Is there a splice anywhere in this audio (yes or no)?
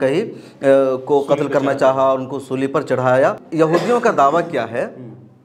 yes